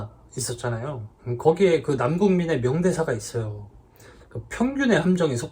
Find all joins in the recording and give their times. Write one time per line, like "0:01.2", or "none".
0:01.1